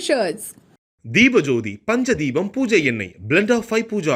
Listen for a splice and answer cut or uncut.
uncut